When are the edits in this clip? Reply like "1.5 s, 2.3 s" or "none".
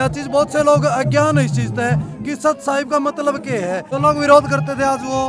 3.9 s